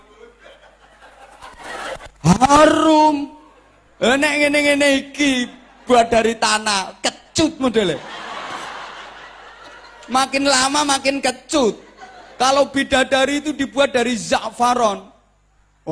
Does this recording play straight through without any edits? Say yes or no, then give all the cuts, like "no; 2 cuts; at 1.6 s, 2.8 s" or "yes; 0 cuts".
yes; 0 cuts